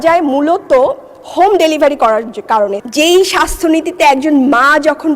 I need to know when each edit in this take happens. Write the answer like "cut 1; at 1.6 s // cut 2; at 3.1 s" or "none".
cut 1; at 2.8 s